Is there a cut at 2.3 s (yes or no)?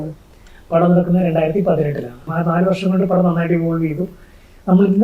yes